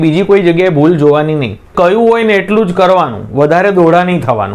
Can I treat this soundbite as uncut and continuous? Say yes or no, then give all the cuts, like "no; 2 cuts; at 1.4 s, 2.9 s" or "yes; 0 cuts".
no; 1 cut; at 1.7 s